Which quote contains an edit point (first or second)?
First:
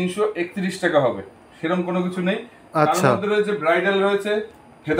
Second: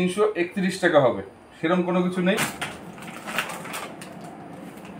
second